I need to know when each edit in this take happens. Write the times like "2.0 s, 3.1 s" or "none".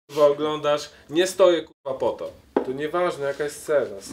2.4 s

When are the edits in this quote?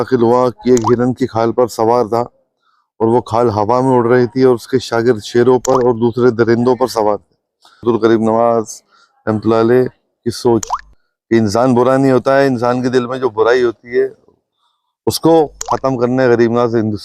7.8 s

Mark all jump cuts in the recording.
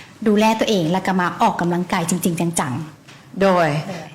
none

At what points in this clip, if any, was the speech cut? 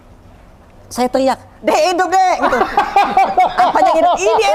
none

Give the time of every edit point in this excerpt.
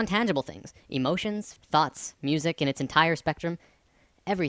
2.4 s

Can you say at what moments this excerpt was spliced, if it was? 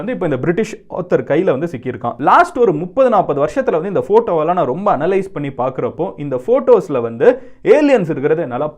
2.1 s

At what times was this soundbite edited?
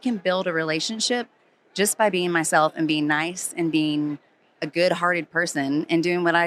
none

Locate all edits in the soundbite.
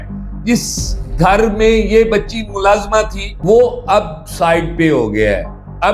3.2 s

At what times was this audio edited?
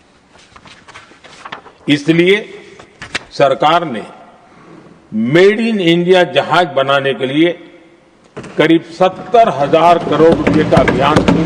none

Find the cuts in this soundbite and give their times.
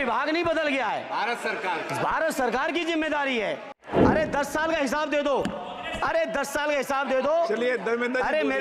3.8 s

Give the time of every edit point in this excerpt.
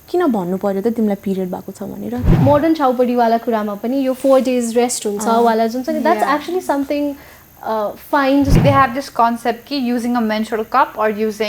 2.3 s, 8.6 s

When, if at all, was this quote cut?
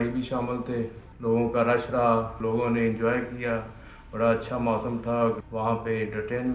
1.0 s, 2.3 s, 5.4 s

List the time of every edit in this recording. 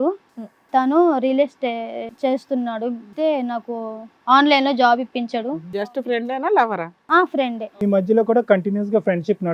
2.0 s, 3.1 s, 5.8 s

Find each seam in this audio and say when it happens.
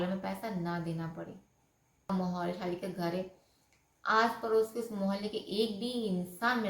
2.1 s

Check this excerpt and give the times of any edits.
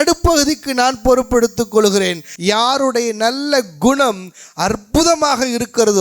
2.3 s

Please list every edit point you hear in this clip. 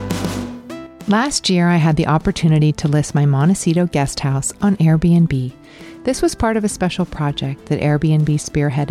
0.9 s

